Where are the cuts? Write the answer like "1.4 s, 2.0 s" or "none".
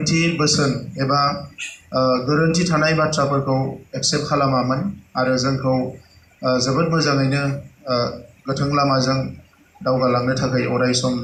none